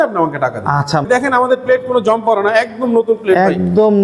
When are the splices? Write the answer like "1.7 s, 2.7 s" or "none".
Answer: 1.1 s